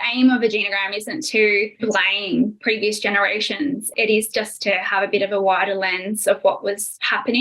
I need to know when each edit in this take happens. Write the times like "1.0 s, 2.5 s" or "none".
3.9 s